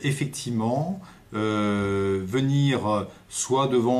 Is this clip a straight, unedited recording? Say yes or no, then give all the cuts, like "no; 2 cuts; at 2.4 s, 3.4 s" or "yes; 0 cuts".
no; 1 cut; at 1.9 s